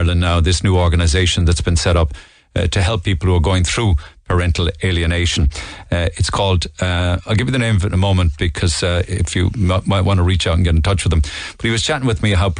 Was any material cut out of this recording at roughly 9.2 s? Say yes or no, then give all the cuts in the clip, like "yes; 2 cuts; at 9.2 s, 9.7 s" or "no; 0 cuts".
yes; 1 cut; at 9.2 s